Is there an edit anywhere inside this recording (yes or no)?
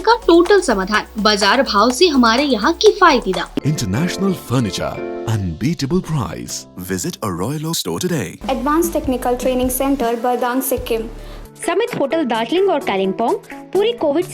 yes